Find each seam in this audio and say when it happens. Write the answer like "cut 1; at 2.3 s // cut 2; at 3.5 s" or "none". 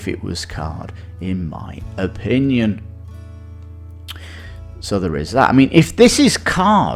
none